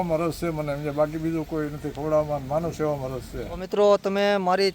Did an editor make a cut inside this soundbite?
yes; 1 cut; at 3.5 s

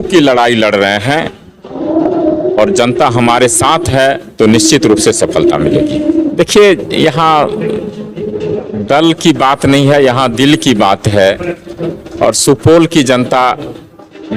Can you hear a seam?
yes; 1 cut; at 6.3 s

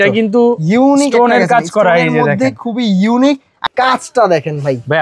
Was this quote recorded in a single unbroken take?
no; 1 cut; at 3.6 s

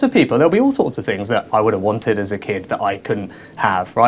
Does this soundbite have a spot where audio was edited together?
no; 0 cuts

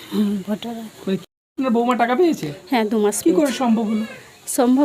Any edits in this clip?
yes; 1 cut; at 1.2 s

